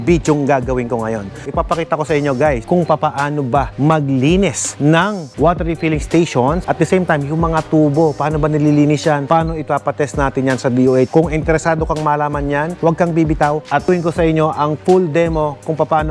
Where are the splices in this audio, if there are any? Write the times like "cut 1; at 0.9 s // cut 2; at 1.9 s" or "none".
cut 1; at 1.4 s